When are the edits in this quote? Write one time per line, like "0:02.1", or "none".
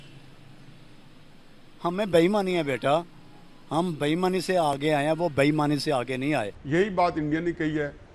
0:06.6